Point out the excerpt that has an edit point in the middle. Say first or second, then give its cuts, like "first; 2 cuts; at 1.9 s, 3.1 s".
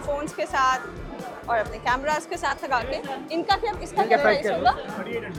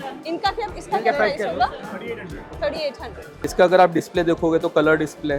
second; 1 cut; at 3.4 s